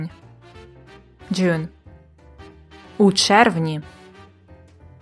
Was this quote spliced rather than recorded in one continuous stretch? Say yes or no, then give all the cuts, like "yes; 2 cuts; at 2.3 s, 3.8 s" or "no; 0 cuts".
yes; 1 cut; at 3.8 s